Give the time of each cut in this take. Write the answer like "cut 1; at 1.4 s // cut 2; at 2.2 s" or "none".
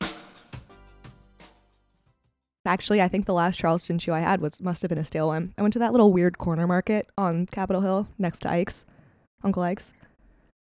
cut 1; at 2.6 s